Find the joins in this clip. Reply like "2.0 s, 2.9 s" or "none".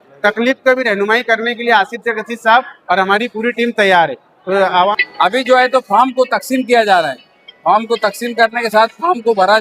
4.9 s